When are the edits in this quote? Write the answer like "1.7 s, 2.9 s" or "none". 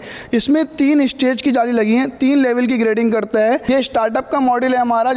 3.6 s